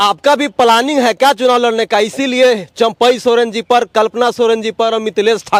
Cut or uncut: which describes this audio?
uncut